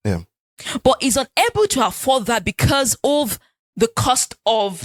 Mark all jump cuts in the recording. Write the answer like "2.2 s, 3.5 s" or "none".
none